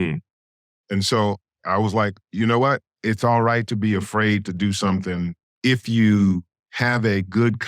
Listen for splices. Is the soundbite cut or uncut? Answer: cut